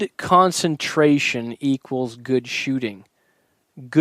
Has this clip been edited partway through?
no; 0 cuts

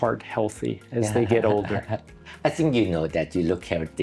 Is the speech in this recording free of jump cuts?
yes; 0 cuts

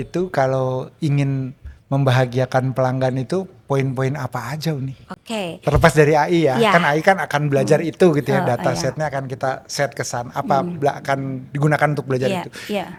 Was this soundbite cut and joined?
no; 0 cuts

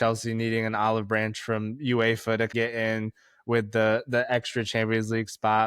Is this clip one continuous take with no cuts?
no; 1 cut; at 2.5 s

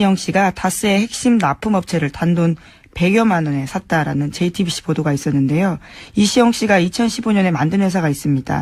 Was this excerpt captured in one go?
no; 1 cut; at 1.9 s

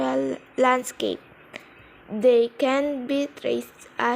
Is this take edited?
yes; 1 cut; at 1.8 s

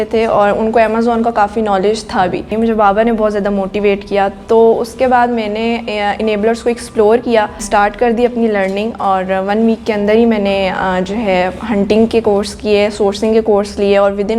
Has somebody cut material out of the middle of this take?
yes; 2 cuts; at 2.5 s, 7.6 s

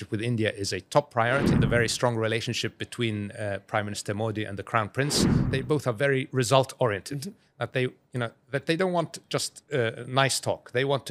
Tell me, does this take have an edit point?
yes; 2 cuts; at 1.6 s, 5.4 s

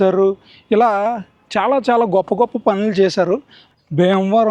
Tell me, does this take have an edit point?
yes; 1 cut; at 3.6 s

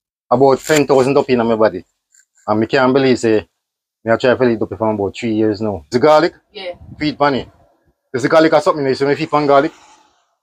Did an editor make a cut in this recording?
yes; 1 cut; at 5.9 s

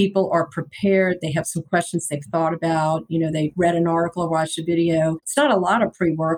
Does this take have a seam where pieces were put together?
yes; 2 cuts; at 3.5 s, 5.2 s

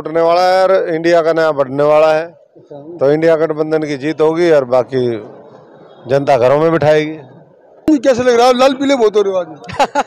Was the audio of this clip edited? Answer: yes; 1 cut; at 7.9 s

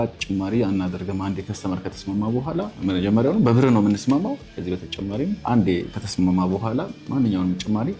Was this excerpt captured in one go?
yes; 0 cuts

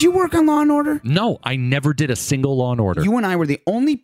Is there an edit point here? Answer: yes; 2 cuts; at 1.0 s, 3.0 s

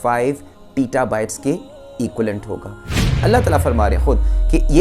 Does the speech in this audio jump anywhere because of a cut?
yes; 1 cut; at 3.0 s

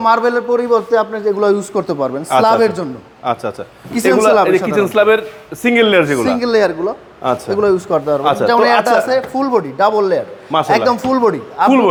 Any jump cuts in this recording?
no; 0 cuts

